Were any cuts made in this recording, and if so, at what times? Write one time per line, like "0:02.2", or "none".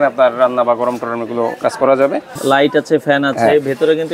0:02.3